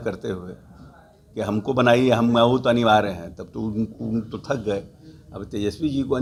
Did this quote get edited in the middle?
no; 0 cuts

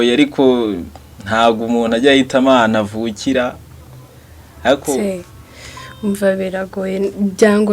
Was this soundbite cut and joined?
yes; 1 cut; at 5.0 s

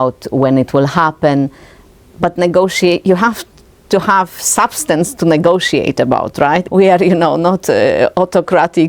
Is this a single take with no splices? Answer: no; 1 cut; at 6.6 s

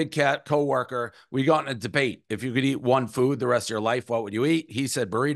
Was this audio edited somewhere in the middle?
no; 0 cuts

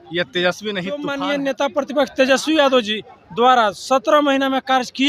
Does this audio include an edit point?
yes; 1 cut; at 1.1 s

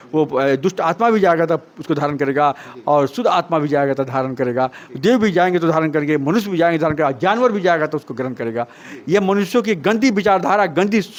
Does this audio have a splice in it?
no; 0 cuts

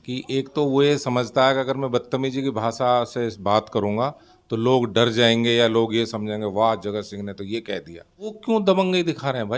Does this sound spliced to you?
yes; 1 cut; at 8.4 s

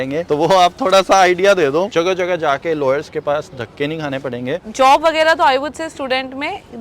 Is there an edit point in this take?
yes; 2 cuts; at 1.9 s, 4.6 s

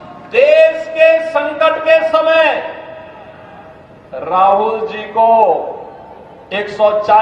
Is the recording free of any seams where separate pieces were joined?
yes; 0 cuts

